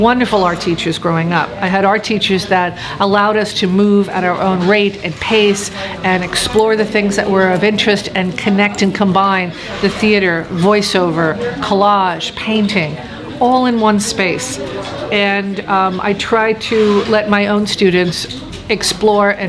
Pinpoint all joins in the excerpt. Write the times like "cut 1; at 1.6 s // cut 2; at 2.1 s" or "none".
none